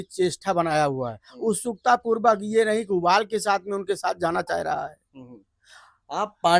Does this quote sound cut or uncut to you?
uncut